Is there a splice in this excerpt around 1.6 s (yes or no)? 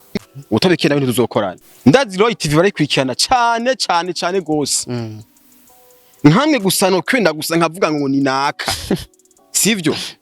yes